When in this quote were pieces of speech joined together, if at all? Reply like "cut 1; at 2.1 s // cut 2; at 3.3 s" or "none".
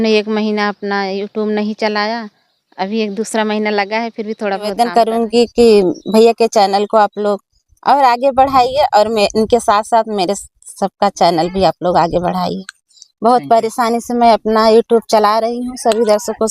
cut 1; at 4.7 s